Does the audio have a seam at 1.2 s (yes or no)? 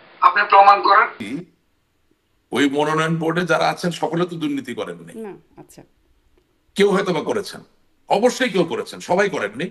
yes